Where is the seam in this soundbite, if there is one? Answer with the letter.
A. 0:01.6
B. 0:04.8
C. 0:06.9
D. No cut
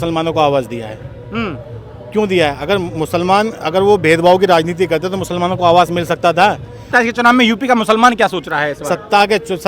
C